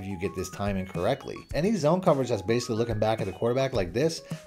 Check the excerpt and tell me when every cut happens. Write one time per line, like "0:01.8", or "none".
0:01.6